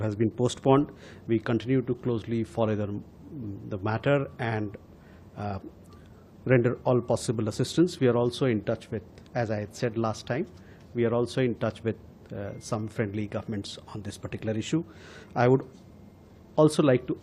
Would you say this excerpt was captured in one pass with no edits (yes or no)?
yes